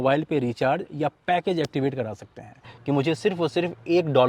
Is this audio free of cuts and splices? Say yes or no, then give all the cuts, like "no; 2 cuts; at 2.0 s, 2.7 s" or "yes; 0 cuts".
no; 1 cut; at 2.7 s